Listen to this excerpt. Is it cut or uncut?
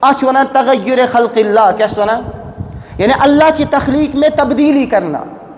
uncut